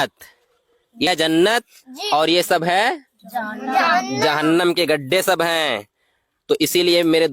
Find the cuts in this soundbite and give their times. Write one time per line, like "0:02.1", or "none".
0:01.1